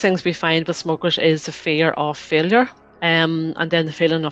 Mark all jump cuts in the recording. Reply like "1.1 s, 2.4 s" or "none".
2.9 s